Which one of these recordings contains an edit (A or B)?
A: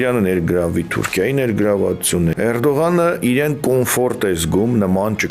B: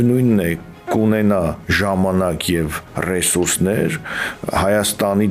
A